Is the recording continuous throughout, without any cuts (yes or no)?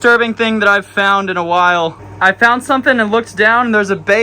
no